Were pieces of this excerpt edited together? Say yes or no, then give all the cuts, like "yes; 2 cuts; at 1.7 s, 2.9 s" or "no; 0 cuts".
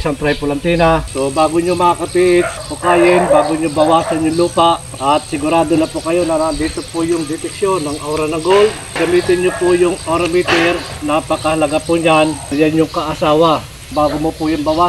yes; 6 cuts; at 1.1 s, 2.6 s, 4.9 s, 9.0 s, 12.5 s, 13.9 s